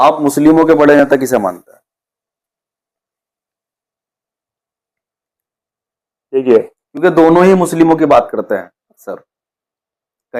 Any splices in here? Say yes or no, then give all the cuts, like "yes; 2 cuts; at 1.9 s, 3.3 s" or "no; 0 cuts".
no; 0 cuts